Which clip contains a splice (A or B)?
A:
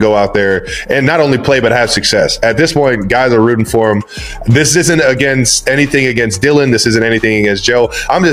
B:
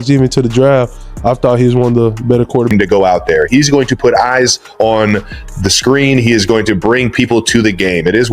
B